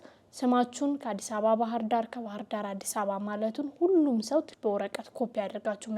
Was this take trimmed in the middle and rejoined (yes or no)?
yes